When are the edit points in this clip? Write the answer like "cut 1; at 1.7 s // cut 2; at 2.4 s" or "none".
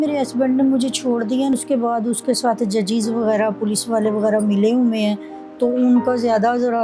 cut 1; at 1.5 s